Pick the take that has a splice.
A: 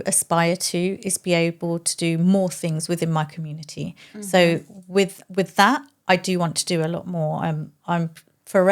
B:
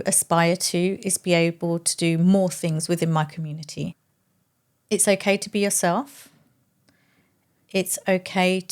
B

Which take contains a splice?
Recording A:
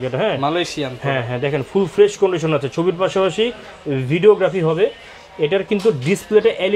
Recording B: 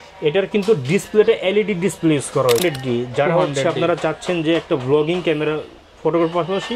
B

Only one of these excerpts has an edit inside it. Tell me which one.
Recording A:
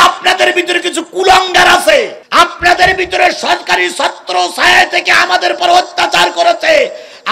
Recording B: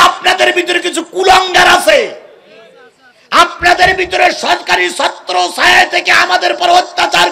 A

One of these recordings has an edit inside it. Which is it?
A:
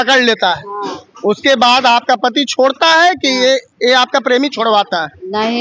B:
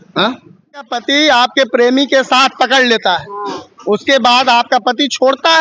B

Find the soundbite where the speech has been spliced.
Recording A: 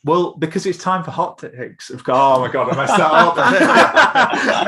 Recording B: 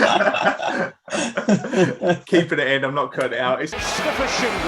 B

